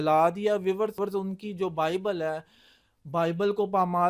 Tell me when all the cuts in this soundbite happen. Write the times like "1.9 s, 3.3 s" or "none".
1.0 s